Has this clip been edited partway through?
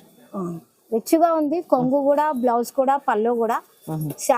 no; 0 cuts

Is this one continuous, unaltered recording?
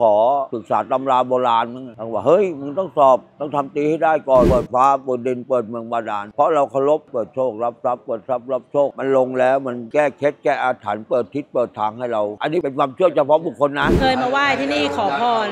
no; 5 cuts; at 4.5 s, 7.1 s, 8.9 s, 12.4 s, 13.9 s

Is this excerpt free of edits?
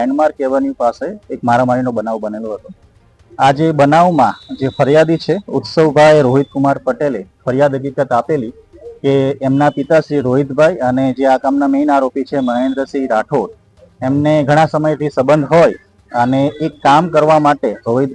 yes; 0 cuts

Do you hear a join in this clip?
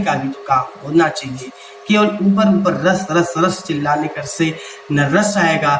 no; 0 cuts

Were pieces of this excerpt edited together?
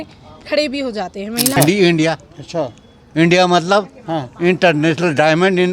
yes; 1 cut; at 1.6 s

